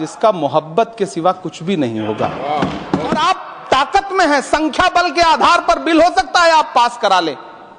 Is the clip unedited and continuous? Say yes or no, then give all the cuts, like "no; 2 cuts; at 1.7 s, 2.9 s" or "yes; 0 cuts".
no; 1 cut; at 3.2 s